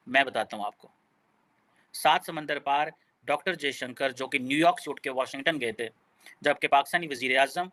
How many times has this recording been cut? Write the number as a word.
zero